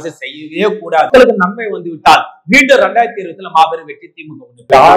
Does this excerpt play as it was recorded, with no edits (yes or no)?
no